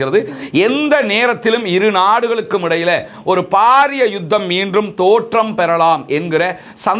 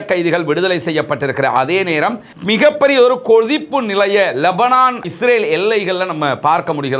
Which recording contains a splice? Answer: second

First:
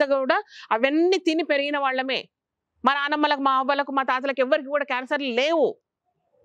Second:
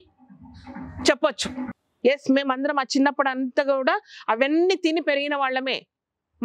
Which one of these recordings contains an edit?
second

